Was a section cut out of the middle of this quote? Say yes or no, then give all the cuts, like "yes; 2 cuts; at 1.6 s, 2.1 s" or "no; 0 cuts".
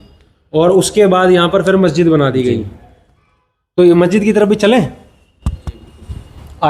no; 0 cuts